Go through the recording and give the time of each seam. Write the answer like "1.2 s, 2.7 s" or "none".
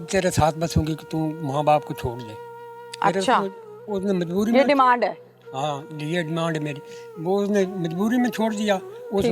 none